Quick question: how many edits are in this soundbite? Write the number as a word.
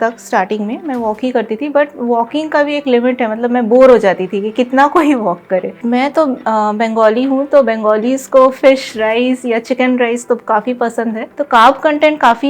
two